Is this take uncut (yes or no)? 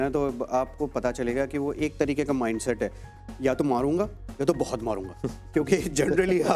yes